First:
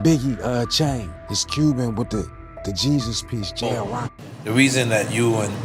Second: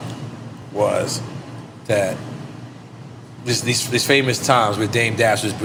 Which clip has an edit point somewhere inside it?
first; 1 cut; at 4.2 s

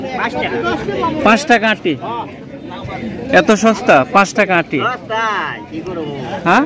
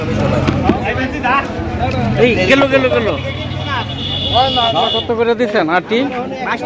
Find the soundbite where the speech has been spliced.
second; 1 cut; at 4.8 s

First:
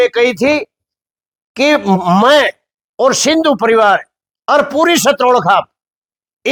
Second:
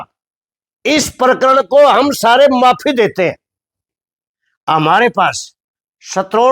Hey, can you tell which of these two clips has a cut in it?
second; 1 cut; at 3.9 s

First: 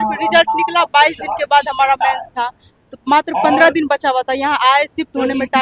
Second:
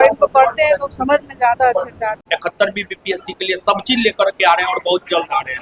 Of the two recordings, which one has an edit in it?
second; 1 cut; at 2.2 s

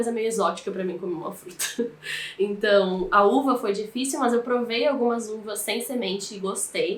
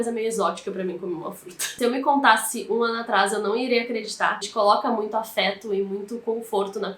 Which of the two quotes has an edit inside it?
second; 2 cuts; at 1.6 s, 4.5 s

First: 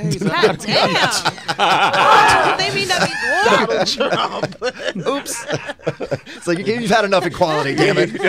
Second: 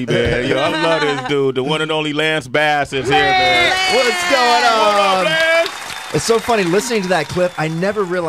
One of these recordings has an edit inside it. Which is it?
second; 1 cut; at 6.9 s

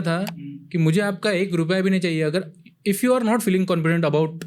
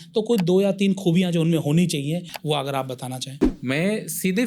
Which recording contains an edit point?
second; 2 cuts; at 2.3 s, 3.5 s

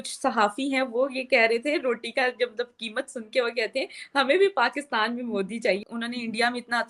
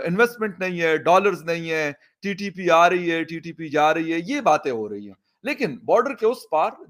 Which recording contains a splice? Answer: first; 1 cut; at 5.8 s

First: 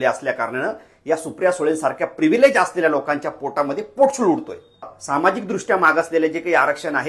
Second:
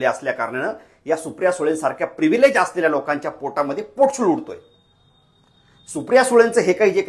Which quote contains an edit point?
first; 1 cut; at 5.0 s

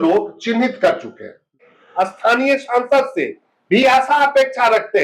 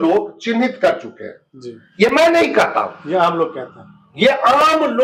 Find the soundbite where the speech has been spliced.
first; 1 cut; at 1.8 s

